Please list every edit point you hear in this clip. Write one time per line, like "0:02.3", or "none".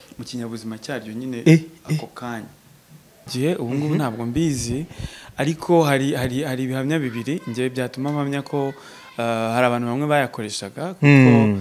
0:03.3

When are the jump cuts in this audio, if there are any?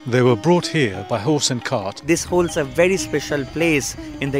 0:02.1

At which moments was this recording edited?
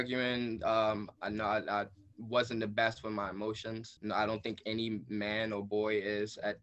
0:01.1
0:03.9

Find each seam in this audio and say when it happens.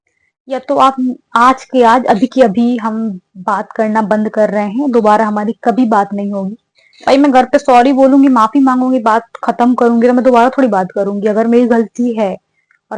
none

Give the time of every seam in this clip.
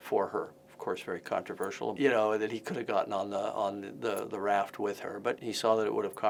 none

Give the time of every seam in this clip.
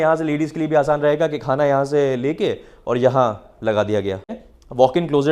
0:04.4

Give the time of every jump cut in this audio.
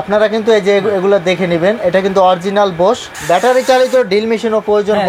0:03.1

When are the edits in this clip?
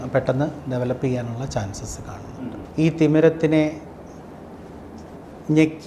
0:02.5

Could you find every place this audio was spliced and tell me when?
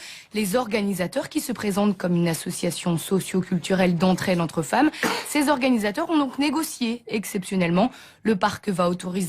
0:07.3

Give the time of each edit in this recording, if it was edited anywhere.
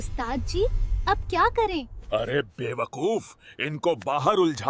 none

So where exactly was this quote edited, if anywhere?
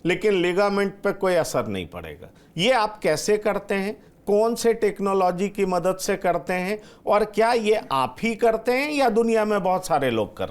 none

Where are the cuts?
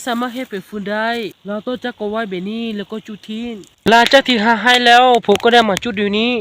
0:01.5
0:03.9

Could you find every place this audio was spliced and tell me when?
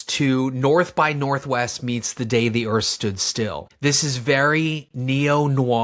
none

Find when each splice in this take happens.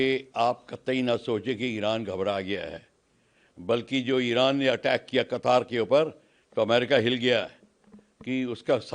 none

